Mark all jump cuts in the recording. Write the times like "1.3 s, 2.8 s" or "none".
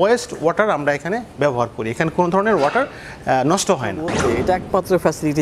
4.2 s